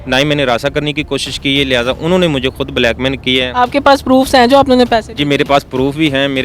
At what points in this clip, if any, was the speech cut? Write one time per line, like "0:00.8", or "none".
none